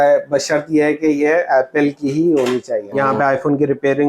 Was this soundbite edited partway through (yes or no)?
yes